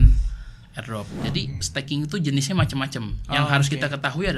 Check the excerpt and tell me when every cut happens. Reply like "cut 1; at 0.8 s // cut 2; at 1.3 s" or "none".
cut 1; at 1.1 s